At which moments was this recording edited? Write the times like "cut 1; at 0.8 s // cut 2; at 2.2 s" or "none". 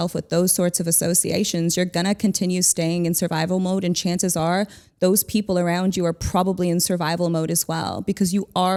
none